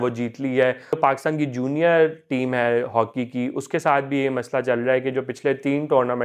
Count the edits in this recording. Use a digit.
1